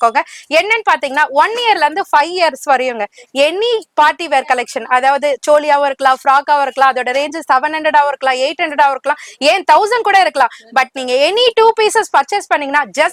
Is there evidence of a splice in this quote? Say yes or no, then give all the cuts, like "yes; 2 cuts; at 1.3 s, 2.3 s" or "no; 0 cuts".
no; 0 cuts